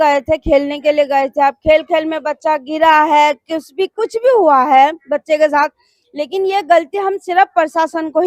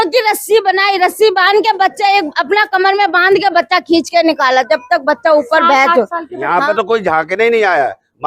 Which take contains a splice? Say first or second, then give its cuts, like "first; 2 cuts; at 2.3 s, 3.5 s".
second; 1 cut; at 6.4 s